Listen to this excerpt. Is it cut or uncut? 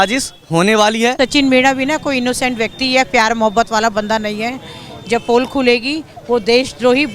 cut